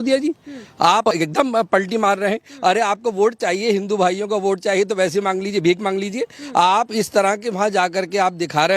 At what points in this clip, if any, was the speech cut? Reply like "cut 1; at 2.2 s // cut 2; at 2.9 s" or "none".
cut 1; at 1.1 s